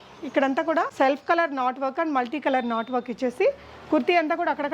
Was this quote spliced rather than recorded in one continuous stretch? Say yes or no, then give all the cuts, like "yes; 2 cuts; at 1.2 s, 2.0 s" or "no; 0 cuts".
yes; 1 cut; at 0.9 s